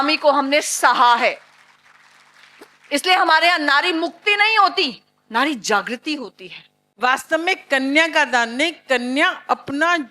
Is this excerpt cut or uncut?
cut